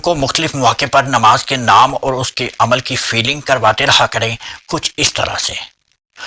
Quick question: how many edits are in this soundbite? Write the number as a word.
zero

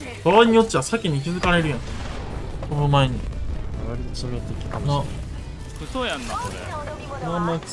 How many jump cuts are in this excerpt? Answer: zero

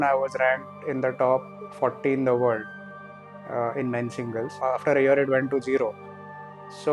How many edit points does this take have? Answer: zero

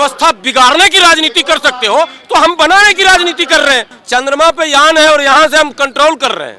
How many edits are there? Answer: one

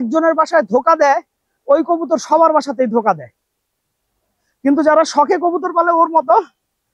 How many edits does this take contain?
zero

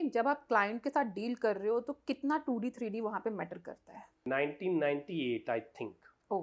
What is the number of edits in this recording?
one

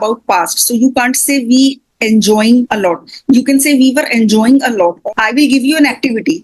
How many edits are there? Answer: two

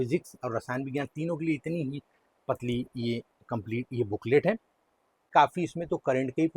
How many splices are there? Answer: one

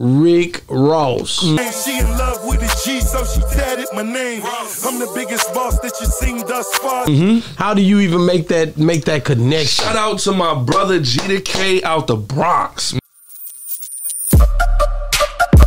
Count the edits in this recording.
one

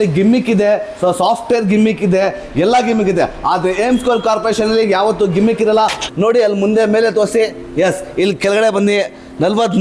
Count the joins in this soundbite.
one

